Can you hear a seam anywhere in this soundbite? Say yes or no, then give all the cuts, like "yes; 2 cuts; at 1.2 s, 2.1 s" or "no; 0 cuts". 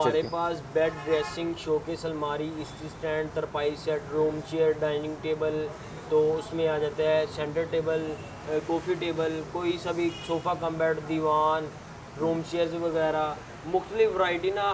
no; 0 cuts